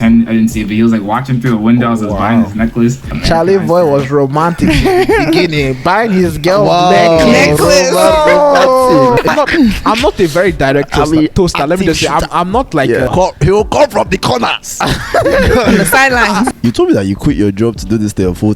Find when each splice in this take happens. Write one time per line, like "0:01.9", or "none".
0:03.1
0:09.3
0:13.1
0:16.5